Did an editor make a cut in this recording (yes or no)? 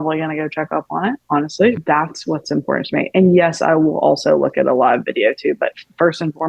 yes